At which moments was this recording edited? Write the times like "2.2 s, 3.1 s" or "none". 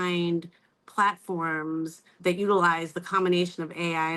2.1 s